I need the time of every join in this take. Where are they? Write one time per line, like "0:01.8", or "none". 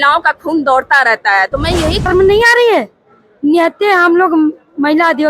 0:02.1

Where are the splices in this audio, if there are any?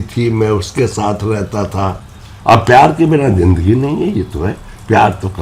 0:02.0

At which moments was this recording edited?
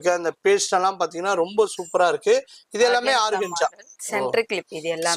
none

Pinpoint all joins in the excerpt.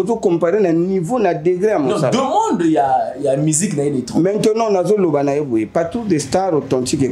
none

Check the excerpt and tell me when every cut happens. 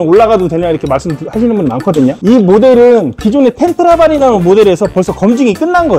none

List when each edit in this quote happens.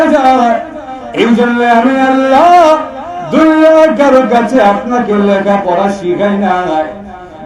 none

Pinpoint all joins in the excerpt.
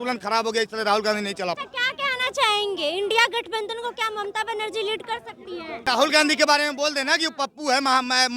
0:01.6
0:05.8

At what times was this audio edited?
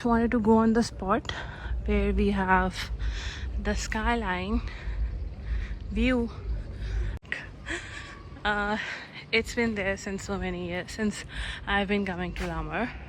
0:07.1

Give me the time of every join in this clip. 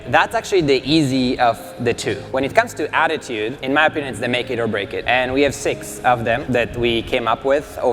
0:02.2
0:03.6
0:05.0
0:06.4

